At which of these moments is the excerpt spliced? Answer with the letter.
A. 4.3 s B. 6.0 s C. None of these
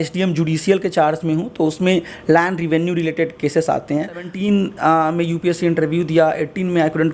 A